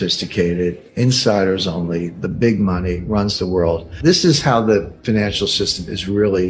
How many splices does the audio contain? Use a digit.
1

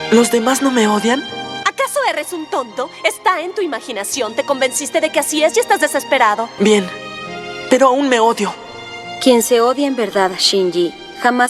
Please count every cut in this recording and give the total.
1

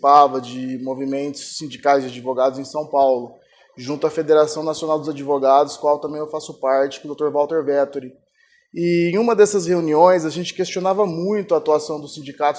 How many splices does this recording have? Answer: 1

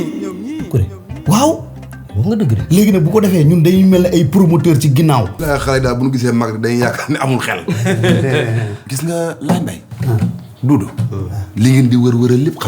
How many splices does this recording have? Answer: 1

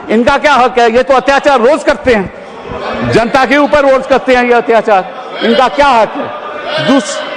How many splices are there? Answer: 0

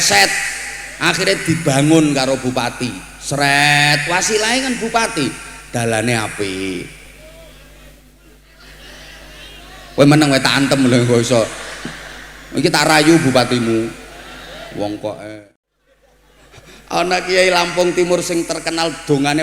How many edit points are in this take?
1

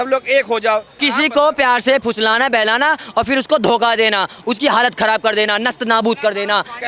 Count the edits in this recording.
1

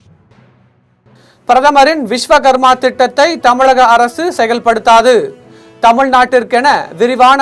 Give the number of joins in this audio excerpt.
1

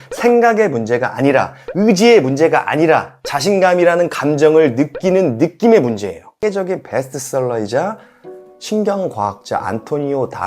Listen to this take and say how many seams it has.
1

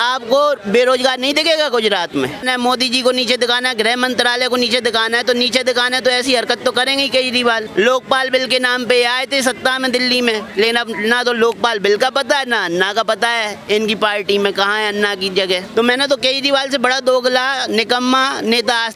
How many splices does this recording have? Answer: 3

